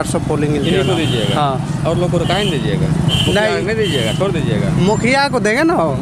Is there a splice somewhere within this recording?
no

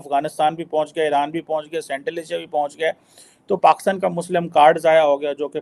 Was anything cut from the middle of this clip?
no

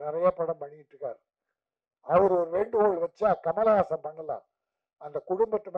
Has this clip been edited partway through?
no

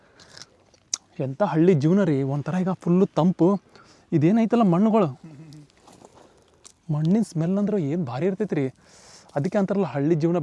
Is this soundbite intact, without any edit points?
yes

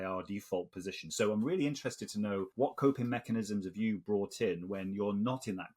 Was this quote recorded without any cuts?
no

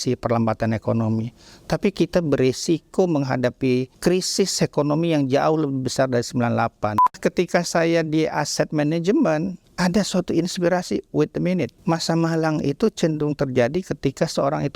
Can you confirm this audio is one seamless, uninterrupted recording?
no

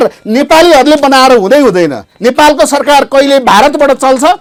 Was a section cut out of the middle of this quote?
no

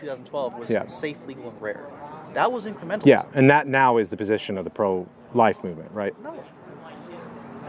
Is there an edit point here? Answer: no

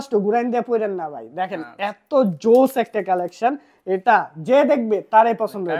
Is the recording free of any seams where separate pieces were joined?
yes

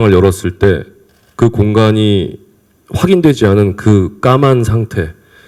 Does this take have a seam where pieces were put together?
no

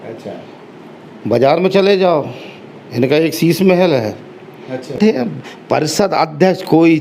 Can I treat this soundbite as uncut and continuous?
no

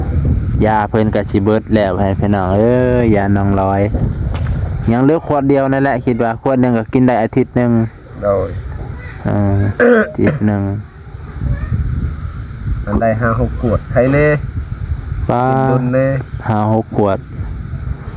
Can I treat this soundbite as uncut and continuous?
yes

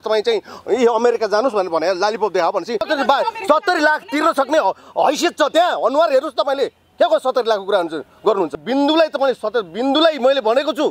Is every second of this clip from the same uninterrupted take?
no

